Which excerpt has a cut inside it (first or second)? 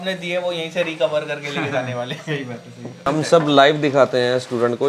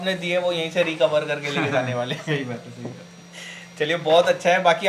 first